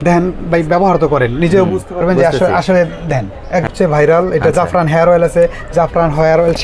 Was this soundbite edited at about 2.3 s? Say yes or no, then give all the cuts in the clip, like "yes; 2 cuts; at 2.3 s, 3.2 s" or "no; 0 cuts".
no; 1 cut; at 3.7 s